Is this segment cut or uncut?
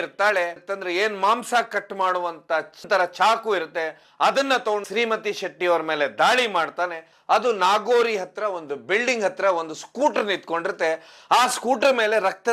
cut